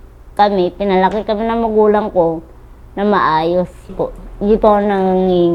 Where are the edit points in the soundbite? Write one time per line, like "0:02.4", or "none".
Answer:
0:04.0